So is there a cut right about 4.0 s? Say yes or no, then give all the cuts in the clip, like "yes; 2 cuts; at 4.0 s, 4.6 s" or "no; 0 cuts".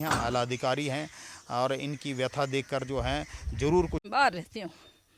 yes; 1 cut; at 4.0 s